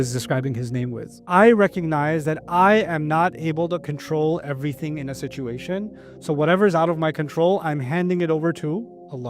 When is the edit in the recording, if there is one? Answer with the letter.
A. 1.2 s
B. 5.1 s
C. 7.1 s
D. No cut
A